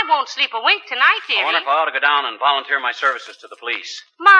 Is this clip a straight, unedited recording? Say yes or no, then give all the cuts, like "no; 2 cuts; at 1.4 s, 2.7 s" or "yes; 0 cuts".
yes; 0 cuts